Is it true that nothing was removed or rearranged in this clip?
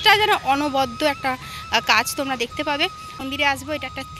no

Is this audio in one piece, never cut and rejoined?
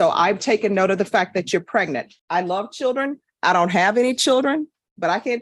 no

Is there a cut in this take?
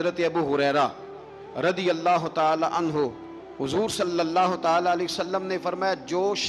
no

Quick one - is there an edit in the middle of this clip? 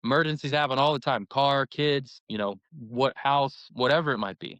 yes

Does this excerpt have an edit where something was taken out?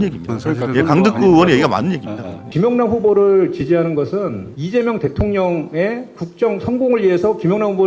yes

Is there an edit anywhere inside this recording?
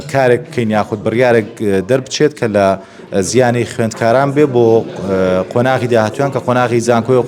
no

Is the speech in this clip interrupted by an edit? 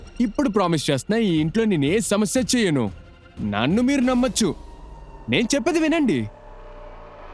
yes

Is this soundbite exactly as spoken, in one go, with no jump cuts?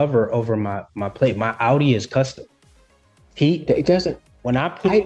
yes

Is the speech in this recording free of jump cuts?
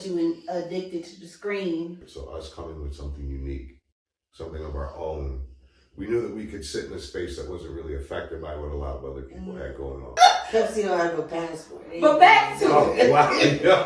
no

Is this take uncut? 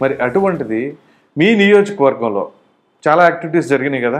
yes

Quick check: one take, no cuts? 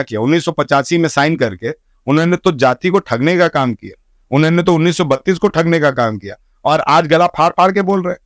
yes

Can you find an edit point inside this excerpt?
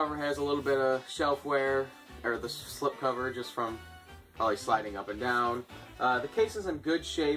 no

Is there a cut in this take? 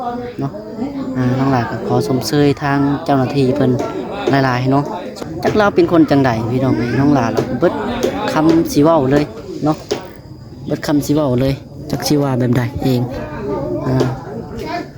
yes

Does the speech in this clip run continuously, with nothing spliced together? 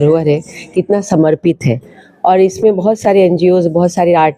yes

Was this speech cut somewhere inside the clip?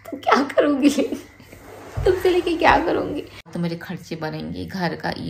yes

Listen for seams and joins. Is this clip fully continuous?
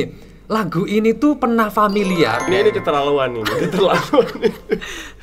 no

